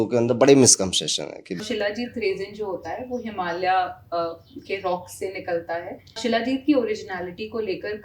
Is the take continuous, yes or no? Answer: no